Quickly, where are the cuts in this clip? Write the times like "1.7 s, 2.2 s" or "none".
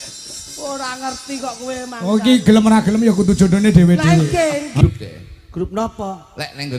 4.8 s